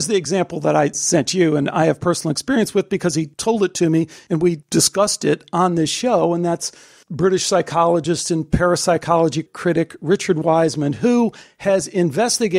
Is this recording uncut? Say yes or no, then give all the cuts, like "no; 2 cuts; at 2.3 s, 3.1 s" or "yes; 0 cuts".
no; 3 cuts; at 1.0 s, 3.3 s, 4.4 s